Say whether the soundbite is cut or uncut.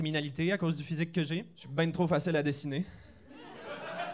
cut